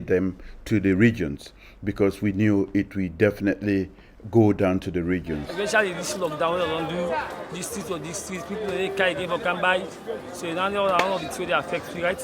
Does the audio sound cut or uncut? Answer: uncut